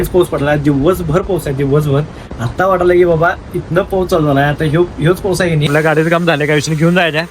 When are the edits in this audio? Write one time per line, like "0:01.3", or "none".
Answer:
0:05.7